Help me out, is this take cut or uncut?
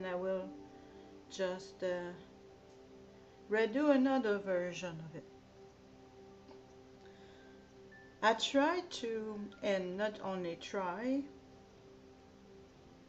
cut